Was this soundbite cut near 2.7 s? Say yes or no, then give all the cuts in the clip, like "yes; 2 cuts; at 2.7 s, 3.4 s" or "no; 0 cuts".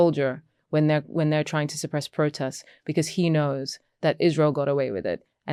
no; 0 cuts